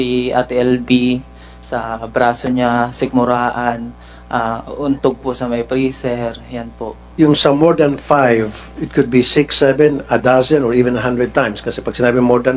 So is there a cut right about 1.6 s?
no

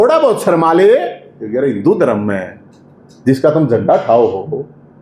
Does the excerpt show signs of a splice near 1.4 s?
yes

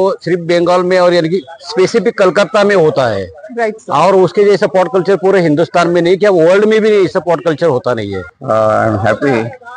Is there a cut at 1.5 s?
no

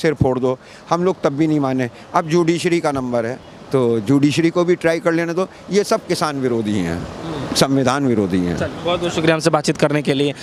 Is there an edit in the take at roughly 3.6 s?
no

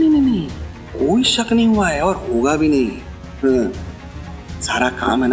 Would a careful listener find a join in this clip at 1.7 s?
no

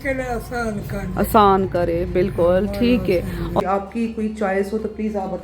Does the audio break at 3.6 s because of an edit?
yes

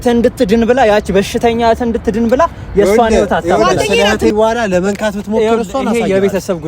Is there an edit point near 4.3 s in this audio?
yes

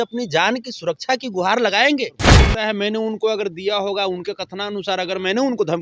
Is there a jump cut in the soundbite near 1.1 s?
no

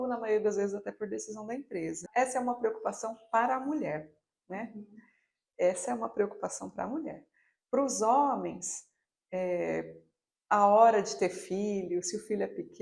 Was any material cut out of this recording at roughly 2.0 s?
yes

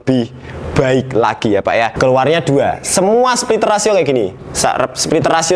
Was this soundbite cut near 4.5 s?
no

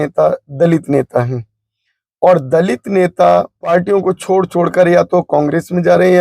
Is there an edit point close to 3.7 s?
yes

